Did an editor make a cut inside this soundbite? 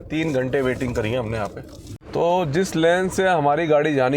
yes; 1 cut; at 2.2 s

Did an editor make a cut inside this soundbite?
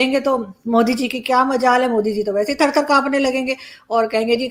no; 0 cuts

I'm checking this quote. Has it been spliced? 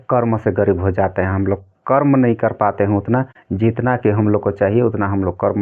no; 0 cuts

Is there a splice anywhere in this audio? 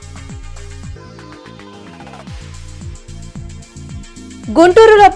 no; 0 cuts

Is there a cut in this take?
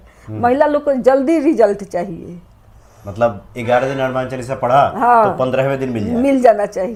no; 0 cuts

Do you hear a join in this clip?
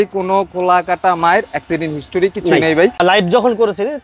yes; 1 cut; at 3.0 s

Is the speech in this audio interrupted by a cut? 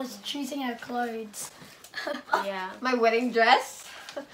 no; 0 cuts

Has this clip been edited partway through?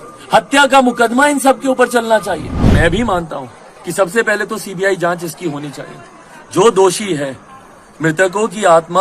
yes; 1 cut; at 2.7 s

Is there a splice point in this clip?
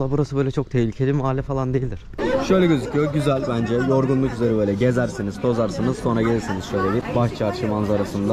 yes; 2 cuts; at 2.1 s, 7.1 s

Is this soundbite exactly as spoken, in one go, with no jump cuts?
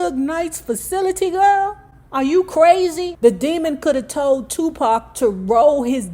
no; 1 cut; at 3.1 s

